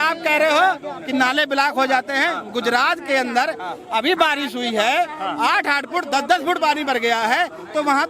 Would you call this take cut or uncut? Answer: uncut